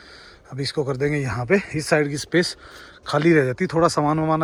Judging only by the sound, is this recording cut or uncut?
uncut